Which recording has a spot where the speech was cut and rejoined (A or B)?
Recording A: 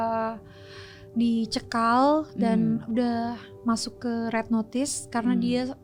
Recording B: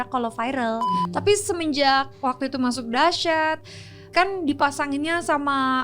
B